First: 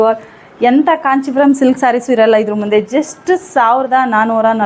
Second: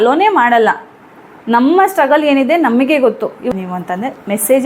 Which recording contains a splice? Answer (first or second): second